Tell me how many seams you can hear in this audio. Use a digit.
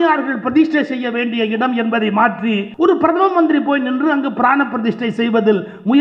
1